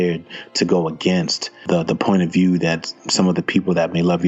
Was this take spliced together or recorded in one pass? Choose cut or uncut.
cut